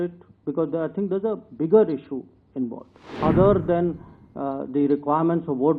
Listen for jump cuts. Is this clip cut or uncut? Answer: cut